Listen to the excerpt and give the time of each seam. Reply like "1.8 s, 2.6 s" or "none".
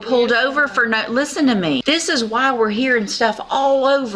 1.8 s